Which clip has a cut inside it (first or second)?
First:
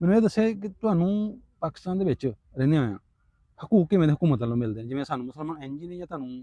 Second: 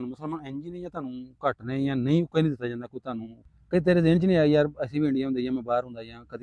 second